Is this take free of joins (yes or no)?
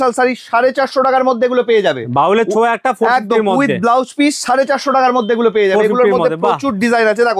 yes